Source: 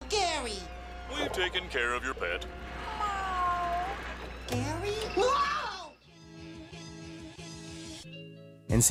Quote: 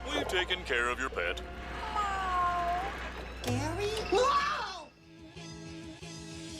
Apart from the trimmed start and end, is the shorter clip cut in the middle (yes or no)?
yes